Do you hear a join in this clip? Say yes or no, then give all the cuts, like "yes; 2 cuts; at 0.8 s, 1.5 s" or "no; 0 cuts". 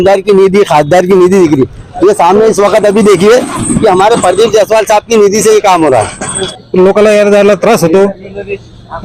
yes; 1 cut; at 6.6 s